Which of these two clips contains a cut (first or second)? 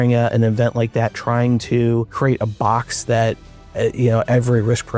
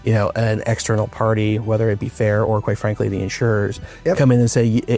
first